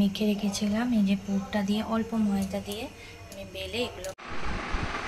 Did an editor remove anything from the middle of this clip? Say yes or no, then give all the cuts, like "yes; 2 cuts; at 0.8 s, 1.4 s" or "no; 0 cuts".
no; 0 cuts